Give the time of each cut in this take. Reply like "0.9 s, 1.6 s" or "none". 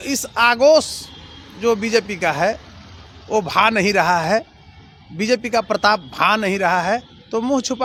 none